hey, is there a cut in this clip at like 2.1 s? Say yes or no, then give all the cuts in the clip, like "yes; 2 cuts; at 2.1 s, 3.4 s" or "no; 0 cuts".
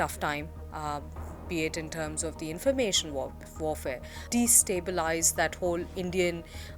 no; 1 cut; at 4.1 s